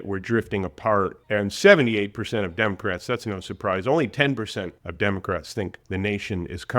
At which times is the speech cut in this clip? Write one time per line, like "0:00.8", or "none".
0:01.2
0:04.8
0:05.8